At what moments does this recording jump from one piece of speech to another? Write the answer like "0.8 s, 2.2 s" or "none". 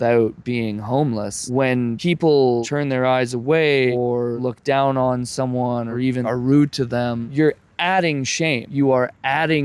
7.2 s, 8.7 s